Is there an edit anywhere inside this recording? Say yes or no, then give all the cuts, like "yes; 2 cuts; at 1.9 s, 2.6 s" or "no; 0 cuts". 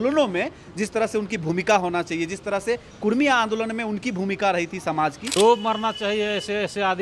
yes; 1 cut; at 5.3 s